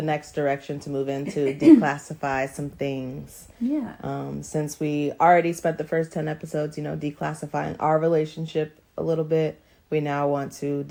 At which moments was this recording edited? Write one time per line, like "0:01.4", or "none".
none